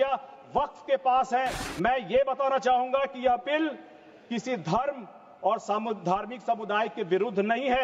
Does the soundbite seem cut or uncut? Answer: cut